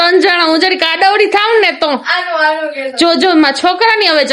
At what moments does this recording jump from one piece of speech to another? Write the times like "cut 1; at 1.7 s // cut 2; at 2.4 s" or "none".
none